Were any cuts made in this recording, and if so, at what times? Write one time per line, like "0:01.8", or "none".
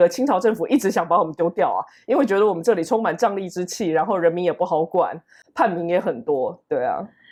none